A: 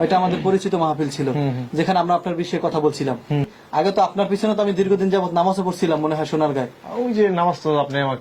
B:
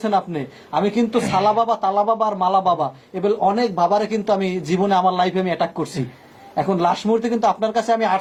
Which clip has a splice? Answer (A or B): A